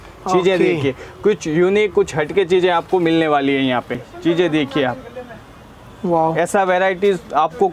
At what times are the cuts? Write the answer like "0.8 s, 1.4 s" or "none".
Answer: 3.9 s